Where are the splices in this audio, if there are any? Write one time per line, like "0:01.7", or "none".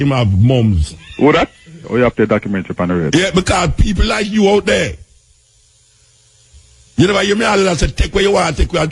0:01.8